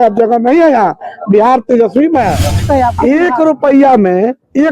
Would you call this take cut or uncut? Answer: cut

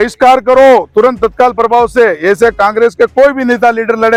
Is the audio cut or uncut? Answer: uncut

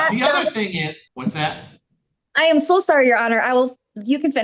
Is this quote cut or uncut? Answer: cut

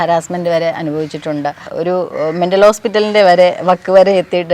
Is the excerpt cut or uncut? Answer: cut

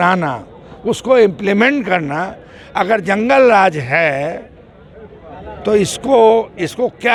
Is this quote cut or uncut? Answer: uncut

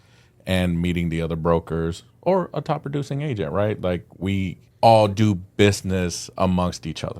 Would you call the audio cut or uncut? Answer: cut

